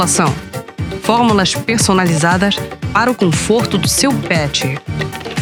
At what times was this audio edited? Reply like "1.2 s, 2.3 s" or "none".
none